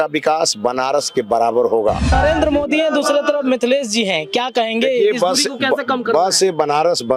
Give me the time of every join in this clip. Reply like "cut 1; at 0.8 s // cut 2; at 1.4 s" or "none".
cut 1; at 2.1 s